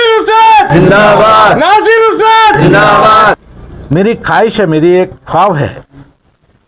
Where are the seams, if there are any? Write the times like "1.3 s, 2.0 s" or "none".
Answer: 3.4 s